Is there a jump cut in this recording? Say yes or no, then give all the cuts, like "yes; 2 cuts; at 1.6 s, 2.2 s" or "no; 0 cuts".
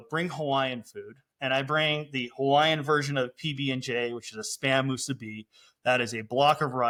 no; 0 cuts